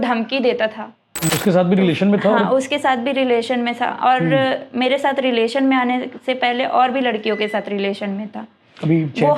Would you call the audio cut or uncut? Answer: cut